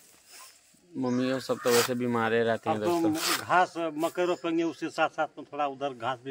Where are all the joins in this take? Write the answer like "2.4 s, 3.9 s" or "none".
none